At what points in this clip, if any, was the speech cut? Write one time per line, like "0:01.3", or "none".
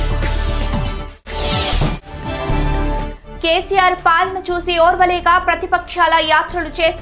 0:01.1